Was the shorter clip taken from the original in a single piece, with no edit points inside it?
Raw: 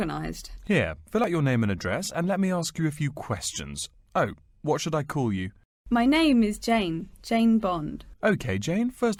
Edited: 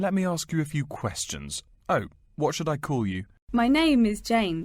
no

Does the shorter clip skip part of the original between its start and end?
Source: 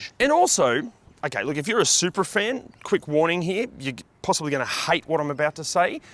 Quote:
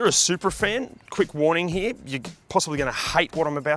no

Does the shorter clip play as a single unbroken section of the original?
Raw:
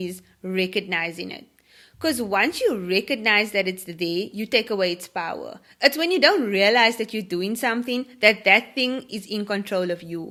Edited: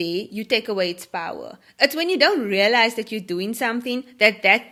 yes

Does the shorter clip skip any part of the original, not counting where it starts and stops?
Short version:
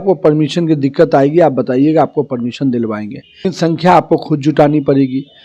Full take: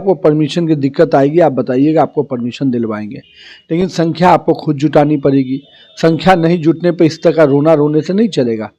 yes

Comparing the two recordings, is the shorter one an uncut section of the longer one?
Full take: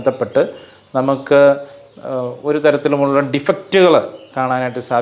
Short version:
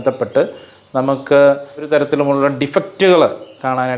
no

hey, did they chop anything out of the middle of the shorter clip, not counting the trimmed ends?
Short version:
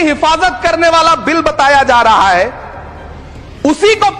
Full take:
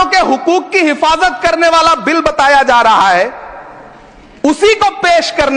no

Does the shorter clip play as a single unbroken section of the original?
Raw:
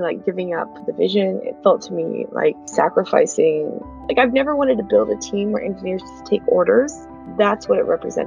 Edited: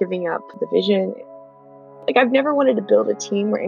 no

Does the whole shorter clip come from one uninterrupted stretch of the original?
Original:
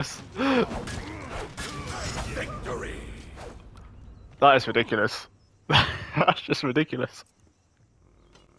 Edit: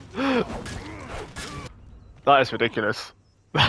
no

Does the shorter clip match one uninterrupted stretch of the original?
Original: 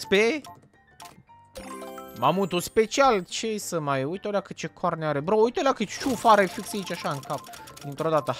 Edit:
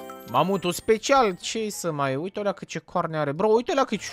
yes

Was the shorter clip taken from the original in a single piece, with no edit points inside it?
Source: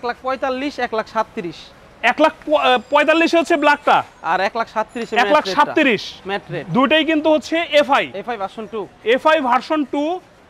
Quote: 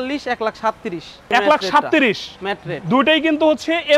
no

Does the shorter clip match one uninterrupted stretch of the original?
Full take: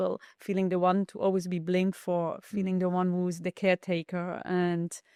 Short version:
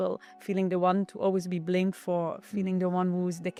yes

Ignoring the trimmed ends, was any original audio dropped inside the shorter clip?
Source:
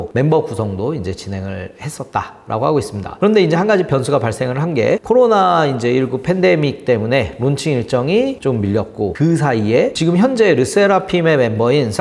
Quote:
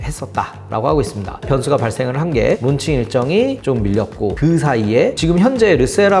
yes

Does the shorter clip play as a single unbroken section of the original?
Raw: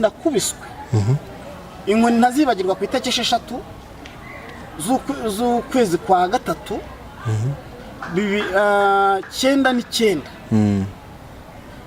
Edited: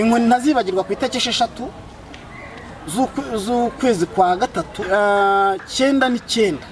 no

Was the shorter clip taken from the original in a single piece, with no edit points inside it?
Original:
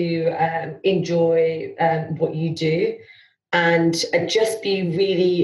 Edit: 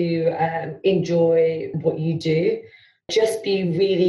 no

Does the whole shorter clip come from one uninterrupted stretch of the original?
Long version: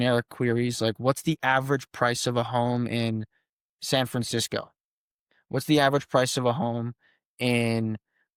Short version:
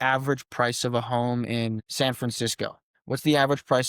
no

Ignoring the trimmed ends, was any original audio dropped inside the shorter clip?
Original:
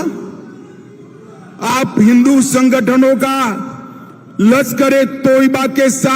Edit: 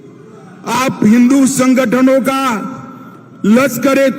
no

